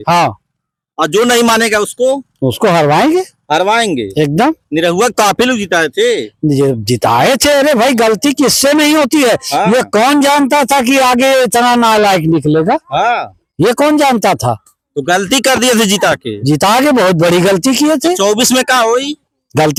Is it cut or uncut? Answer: uncut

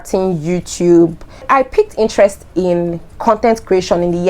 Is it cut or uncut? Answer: cut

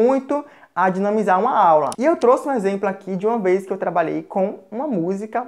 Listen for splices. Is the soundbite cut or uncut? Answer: cut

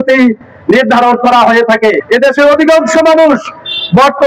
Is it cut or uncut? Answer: cut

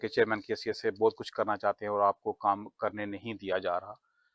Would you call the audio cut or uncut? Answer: uncut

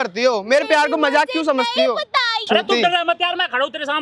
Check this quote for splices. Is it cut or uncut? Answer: cut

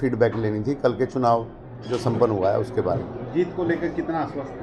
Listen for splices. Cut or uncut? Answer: uncut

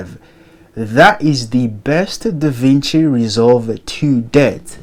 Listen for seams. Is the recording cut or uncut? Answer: uncut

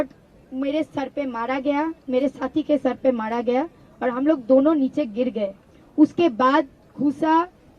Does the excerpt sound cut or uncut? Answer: uncut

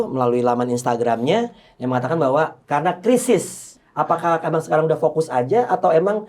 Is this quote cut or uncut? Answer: cut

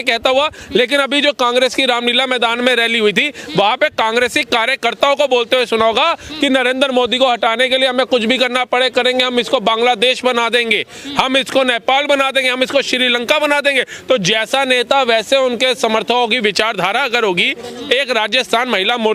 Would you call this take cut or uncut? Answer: uncut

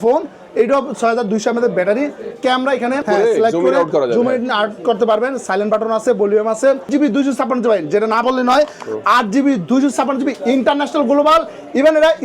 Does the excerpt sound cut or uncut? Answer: cut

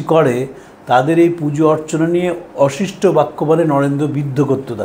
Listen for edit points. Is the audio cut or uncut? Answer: uncut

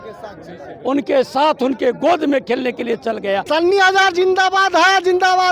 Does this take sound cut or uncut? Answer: cut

